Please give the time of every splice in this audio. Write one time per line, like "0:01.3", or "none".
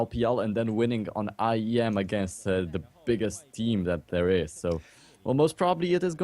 0:01.8